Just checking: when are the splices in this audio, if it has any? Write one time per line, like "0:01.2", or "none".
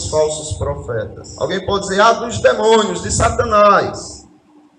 0:01.2